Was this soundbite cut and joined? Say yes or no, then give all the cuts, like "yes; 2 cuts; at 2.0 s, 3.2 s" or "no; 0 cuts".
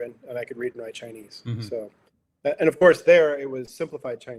no; 0 cuts